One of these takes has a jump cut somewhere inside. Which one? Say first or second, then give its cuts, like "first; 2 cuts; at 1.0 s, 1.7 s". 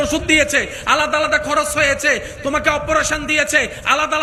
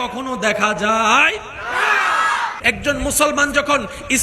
second; 1 cut; at 2.6 s